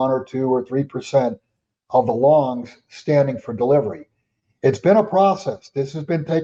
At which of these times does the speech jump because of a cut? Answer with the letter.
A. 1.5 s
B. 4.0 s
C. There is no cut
C